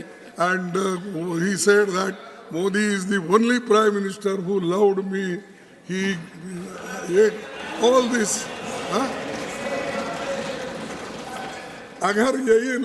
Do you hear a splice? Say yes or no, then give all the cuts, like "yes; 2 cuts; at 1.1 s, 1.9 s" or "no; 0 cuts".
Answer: no; 0 cuts